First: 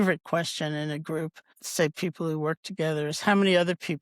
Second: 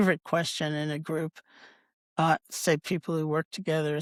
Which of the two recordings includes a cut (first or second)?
first